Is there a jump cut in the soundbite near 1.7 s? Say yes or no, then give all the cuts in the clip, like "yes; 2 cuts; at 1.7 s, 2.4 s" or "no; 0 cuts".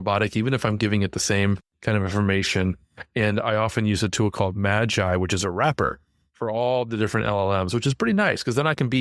yes; 1 cut; at 1.7 s